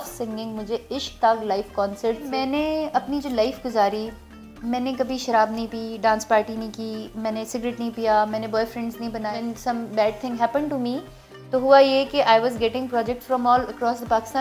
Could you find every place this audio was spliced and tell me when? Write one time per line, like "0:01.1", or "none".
0:02.3
0:09.3